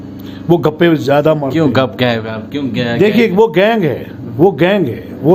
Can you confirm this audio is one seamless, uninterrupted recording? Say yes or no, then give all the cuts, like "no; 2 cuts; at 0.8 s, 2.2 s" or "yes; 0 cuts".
yes; 0 cuts